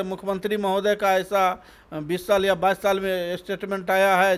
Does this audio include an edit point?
no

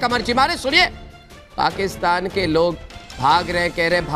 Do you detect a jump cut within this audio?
no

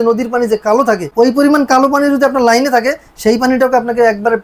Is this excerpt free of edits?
no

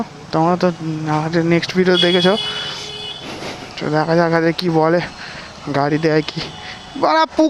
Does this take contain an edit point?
no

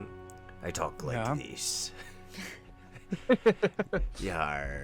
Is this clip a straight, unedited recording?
yes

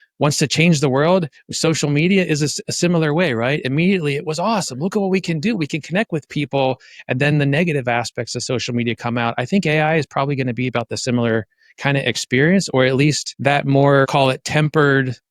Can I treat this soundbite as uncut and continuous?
no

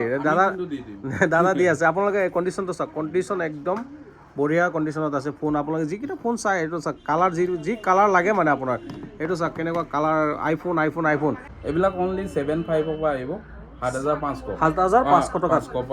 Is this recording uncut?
no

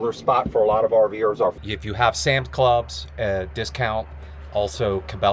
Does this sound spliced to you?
yes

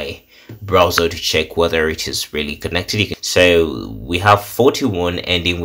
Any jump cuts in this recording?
yes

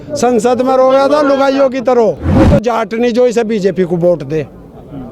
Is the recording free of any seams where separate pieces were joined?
no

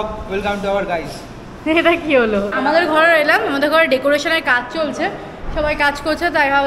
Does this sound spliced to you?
yes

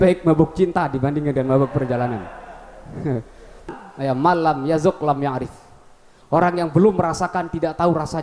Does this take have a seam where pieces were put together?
yes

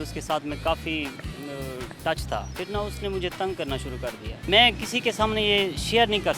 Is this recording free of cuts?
no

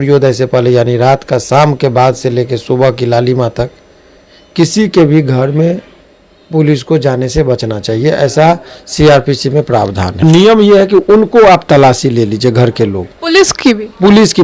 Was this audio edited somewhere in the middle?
yes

